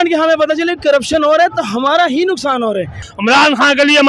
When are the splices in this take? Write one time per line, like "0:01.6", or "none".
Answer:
0:03.0

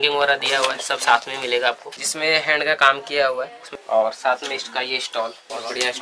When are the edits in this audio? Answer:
none

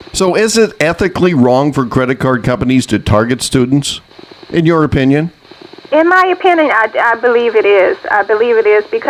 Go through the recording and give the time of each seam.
none

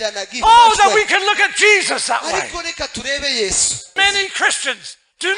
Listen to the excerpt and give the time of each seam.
0:03.9

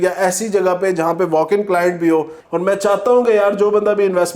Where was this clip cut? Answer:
0:02.4

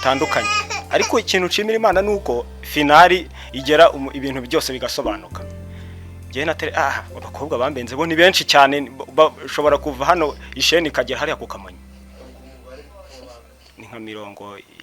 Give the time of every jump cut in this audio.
none

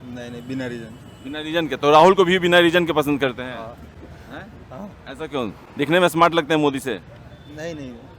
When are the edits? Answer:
none

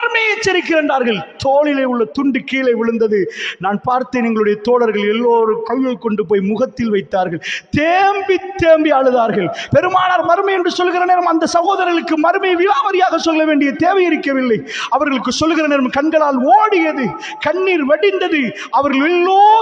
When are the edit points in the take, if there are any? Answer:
none

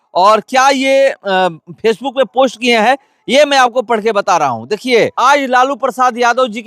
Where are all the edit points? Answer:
0:05.1

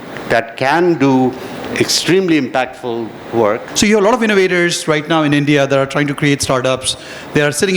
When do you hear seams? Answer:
0:03.7

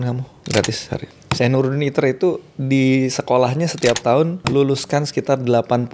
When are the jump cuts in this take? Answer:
0:01.2
0:04.4

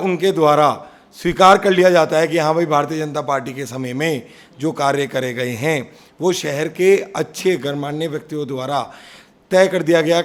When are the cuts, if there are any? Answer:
none

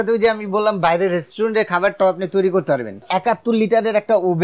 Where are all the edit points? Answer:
0:03.1

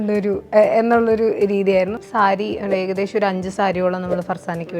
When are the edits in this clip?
0:02.0

